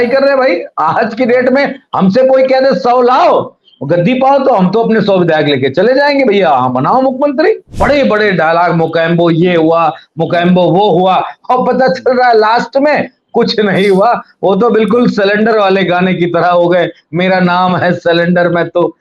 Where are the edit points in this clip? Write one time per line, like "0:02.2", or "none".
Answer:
0:07.7